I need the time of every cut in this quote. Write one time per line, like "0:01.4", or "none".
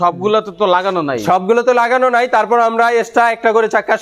none

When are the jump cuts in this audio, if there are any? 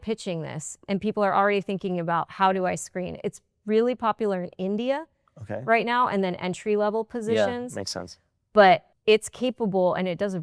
0:08.9

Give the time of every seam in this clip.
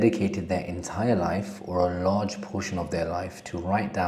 none

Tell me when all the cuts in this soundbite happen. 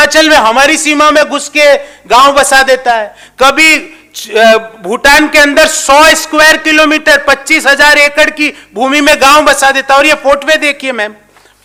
none

